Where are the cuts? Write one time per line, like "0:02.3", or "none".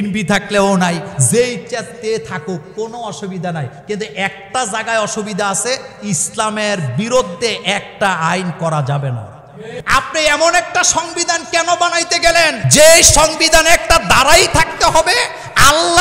0:09.8
0:12.6